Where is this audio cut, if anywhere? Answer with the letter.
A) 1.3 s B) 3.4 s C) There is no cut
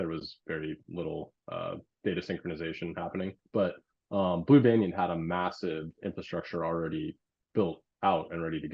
B